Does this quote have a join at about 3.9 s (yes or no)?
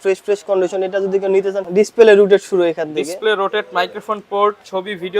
no